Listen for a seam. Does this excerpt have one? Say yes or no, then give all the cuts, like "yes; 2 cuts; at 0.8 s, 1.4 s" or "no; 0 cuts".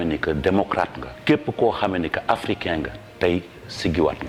no; 0 cuts